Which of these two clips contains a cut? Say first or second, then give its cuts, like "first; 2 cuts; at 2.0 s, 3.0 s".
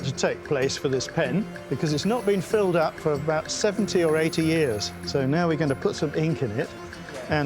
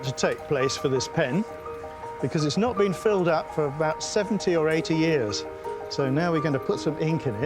first; 2 cuts; at 1.6 s, 4.9 s